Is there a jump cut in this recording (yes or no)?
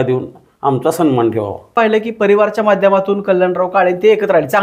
yes